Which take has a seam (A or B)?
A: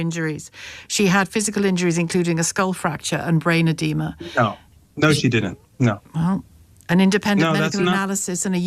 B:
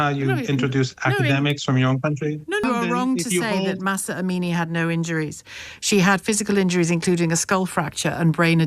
B